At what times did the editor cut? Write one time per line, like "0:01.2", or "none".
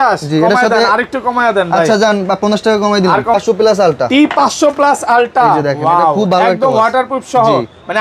0:03.3